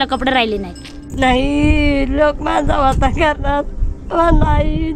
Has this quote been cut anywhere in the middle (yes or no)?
yes